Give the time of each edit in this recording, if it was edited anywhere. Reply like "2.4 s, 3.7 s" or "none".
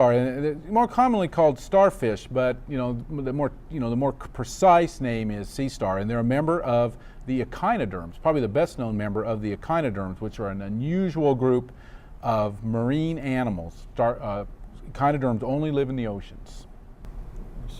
16.3 s